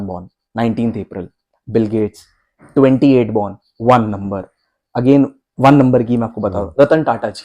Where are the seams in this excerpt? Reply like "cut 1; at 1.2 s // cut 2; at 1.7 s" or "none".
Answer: none